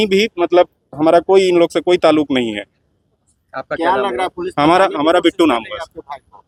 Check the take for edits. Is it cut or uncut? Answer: uncut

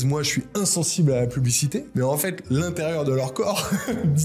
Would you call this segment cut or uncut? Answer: cut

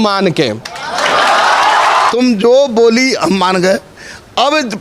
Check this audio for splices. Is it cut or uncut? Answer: cut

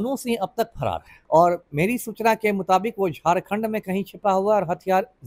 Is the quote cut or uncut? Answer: cut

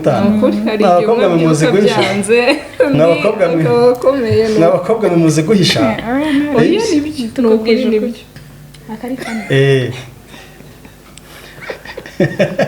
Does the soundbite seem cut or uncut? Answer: cut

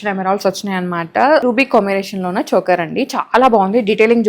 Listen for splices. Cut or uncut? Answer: cut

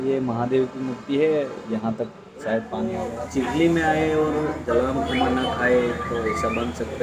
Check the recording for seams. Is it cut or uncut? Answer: cut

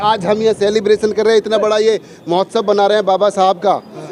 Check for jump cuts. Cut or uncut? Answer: uncut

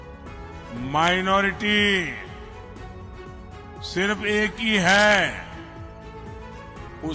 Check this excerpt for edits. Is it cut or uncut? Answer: cut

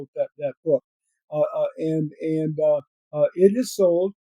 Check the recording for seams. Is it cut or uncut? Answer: uncut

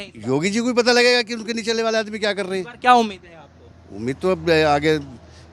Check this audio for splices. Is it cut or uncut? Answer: uncut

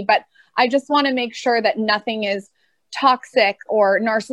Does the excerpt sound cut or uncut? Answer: uncut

